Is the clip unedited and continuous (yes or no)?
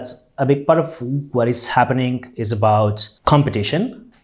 no